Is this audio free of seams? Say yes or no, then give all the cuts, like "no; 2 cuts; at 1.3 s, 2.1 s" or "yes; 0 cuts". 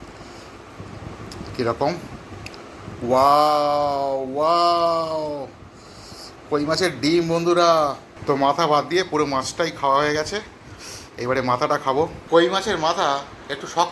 no; 2 cuts; at 8.1 s, 12.2 s